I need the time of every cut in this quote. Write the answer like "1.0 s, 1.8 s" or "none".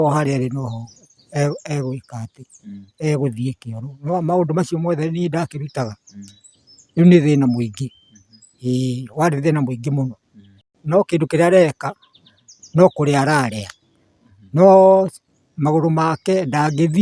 10.7 s